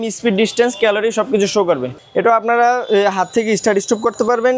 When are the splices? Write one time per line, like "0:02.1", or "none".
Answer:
0:01.9

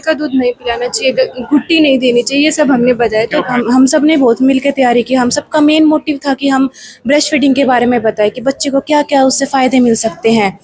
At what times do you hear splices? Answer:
0:03.5

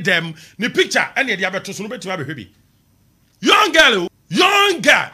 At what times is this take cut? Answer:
0:04.2

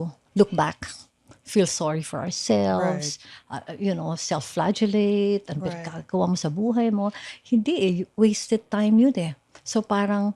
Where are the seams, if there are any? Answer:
none

